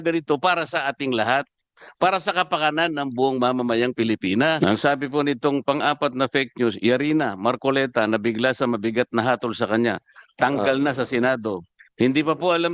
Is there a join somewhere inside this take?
yes; 1 cut; at 4.6 s

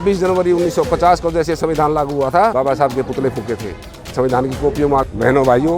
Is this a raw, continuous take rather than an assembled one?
no; 2 cuts; at 2.5 s, 5.0 s

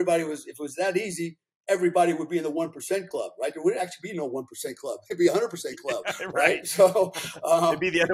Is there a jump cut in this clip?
no; 0 cuts

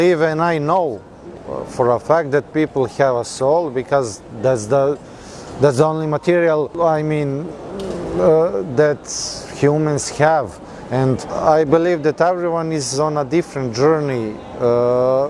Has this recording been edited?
no; 0 cuts

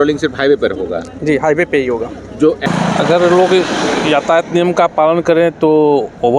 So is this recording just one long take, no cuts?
no; 1 cut; at 2.6 s

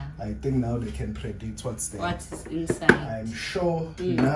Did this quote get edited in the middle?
no; 0 cuts

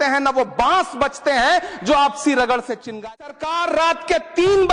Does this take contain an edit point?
yes; 1 cut; at 3.2 s

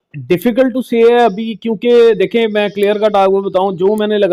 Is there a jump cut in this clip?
no; 0 cuts

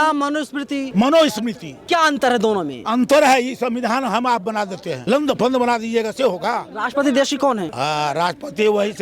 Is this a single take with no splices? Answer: no; 5 cuts; at 0.9 s, 1.7 s, 4.9 s, 6.7 s, 7.7 s

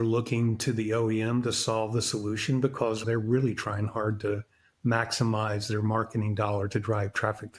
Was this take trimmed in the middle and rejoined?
yes; 1 cut; at 3.0 s

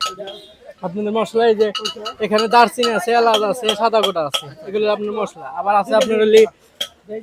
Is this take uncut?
yes; 0 cuts

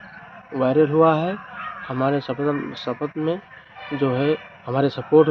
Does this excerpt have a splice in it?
no; 0 cuts

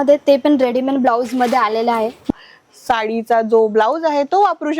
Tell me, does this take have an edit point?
yes; 1 cut; at 2.3 s

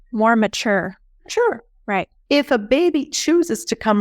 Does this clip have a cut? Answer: yes; 2 cuts; at 1.1 s, 2.2 s

